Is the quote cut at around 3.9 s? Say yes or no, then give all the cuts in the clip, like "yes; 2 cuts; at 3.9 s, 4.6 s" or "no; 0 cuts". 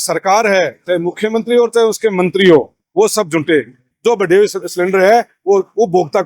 yes; 1 cut; at 3.9 s